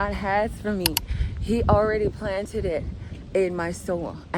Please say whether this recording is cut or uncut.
uncut